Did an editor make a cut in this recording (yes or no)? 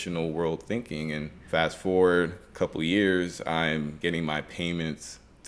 yes